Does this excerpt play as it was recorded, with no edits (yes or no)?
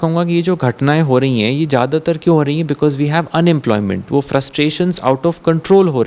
yes